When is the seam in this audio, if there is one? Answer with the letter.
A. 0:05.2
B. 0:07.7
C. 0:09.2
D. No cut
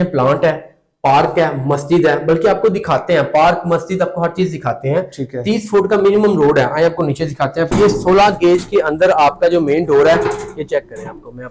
B